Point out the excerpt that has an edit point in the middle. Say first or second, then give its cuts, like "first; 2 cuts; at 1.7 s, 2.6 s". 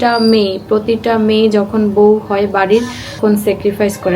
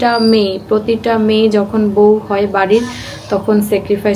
first; 1 cut; at 3.2 s